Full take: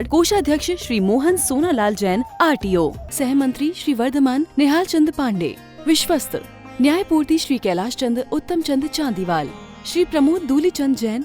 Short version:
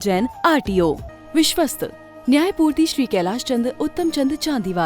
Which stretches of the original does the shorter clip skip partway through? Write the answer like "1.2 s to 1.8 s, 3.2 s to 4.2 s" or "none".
3.1 s to 5.6 s